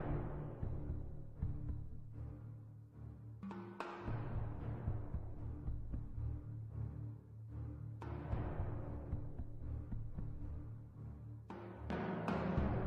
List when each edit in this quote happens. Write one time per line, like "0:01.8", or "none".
none